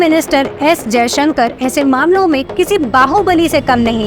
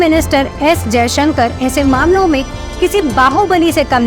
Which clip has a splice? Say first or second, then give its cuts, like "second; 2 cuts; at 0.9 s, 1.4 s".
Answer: first; 1 cut; at 2.5 s